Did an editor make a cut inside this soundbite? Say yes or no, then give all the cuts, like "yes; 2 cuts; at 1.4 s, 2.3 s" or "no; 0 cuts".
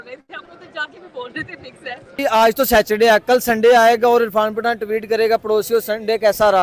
yes; 1 cut; at 2.2 s